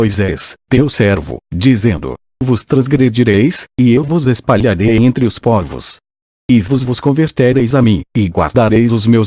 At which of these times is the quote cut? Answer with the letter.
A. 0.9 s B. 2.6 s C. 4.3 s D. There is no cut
A